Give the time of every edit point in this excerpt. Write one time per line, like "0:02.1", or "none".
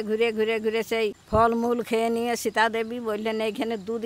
0:01.2